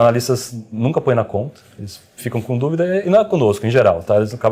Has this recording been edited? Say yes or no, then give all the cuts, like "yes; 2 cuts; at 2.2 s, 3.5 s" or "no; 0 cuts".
no; 0 cuts